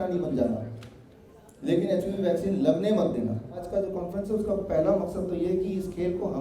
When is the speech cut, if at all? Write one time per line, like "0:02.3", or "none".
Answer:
0:03.6